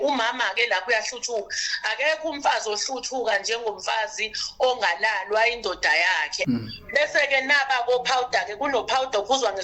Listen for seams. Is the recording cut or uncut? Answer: cut